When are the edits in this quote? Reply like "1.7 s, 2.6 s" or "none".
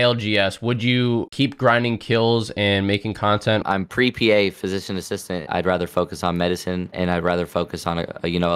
3.6 s, 5.4 s

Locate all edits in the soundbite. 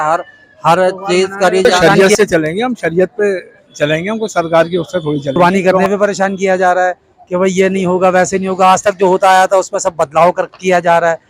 1.7 s, 5.4 s

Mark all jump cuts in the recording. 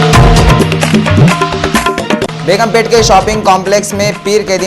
2.3 s

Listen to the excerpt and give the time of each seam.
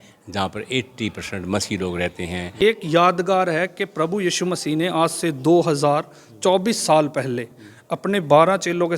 2.8 s

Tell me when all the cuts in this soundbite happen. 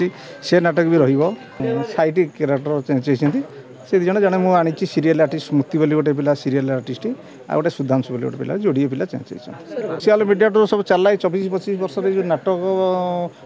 1.6 s, 9.9 s

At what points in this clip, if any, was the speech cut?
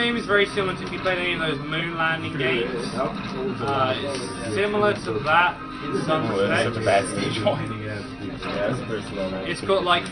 6.4 s

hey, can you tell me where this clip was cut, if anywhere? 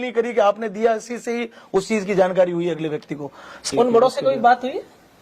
3.6 s

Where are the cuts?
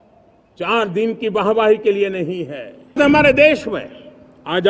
3.0 s

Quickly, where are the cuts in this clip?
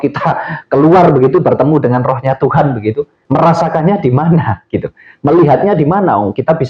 3.1 s

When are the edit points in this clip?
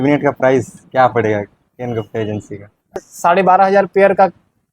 3.1 s

